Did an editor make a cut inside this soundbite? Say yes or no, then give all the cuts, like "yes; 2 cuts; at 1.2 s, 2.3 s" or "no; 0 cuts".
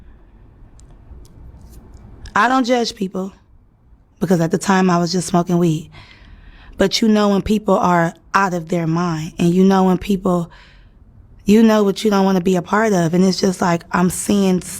yes; 1 cut; at 10.6 s